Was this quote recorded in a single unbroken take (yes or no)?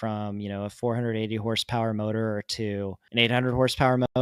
no